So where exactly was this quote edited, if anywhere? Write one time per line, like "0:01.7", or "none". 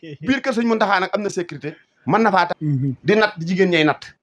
0:02.5